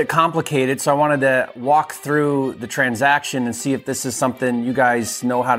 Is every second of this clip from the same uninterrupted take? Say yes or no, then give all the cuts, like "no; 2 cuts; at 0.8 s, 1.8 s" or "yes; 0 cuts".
yes; 0 cuts